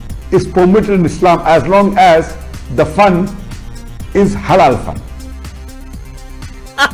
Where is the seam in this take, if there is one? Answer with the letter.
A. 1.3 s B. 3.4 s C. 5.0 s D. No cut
D